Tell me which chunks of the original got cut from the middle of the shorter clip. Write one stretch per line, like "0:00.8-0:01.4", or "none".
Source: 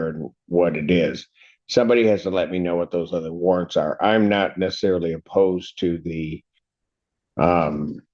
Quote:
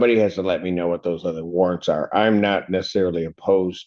none